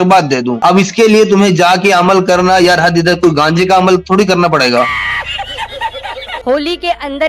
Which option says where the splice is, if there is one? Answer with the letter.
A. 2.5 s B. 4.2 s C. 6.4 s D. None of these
C